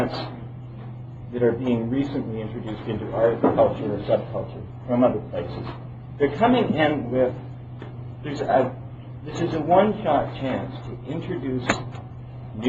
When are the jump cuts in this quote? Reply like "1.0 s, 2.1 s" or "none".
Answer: none